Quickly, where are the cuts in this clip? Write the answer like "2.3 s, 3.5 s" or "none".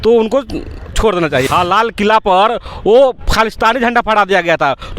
1.5 s